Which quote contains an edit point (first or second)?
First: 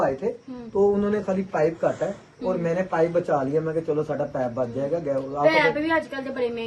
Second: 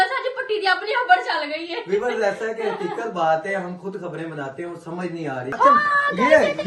second